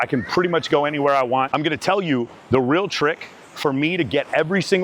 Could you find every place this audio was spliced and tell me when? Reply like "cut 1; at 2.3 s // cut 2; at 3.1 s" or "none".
cut 1; at 1.5 s